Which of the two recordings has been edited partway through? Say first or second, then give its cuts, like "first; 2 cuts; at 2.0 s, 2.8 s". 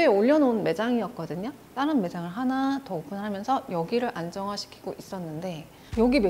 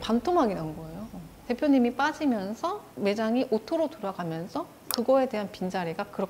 first; 1 cut; at 1.6 s